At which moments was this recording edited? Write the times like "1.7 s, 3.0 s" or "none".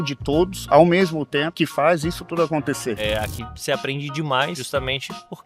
1.5 s, 3.0 s, 4.6 s